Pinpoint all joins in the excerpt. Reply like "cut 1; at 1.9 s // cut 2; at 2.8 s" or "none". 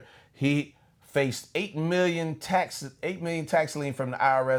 none